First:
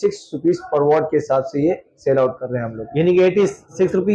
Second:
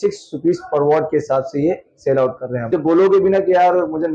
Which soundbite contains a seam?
second; 1 cut; at 2.7 s

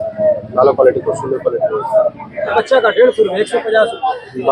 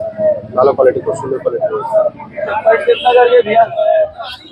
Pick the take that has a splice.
first; 1 cut; at 2.6 s

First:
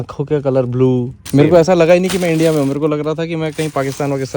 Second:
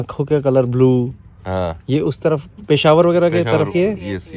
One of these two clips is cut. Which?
first; 1 cut; at 1.2 s

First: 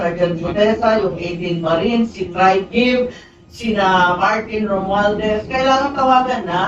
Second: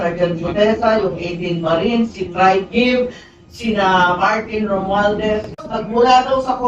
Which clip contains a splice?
second; 1 cut; at 5.6 s

